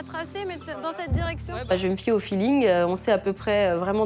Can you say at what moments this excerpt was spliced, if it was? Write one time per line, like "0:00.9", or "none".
0:01.7